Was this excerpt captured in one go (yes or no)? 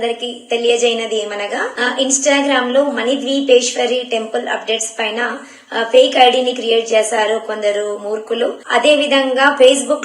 no